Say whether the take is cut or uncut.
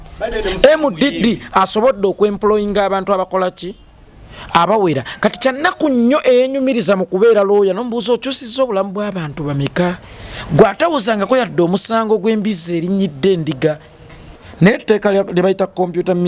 cut